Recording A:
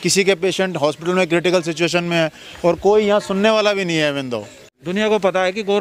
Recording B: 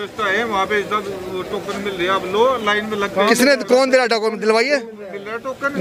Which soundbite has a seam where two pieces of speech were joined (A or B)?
A